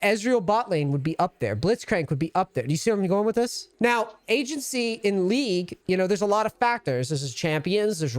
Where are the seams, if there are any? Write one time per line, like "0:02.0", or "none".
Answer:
0:03.6
0:05.7